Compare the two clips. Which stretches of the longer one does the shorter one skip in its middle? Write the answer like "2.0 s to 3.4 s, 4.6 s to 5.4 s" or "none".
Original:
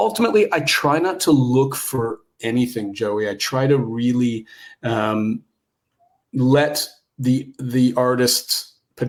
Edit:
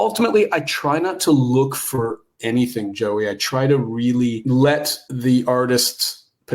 4.4 s to 6.3 s, 7.0 s to 7.5 s